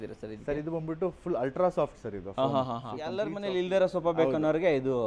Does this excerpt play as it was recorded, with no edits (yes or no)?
no